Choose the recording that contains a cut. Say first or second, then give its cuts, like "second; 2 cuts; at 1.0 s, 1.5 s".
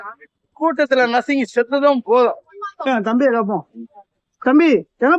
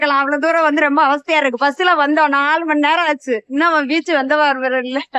first; 1 cut; at 2.9 s